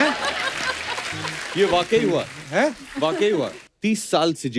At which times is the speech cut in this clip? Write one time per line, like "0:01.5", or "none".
0:03.6